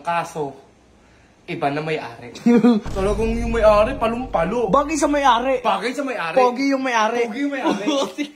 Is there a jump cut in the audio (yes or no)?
yes